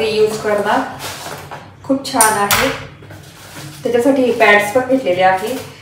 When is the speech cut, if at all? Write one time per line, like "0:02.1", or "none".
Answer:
none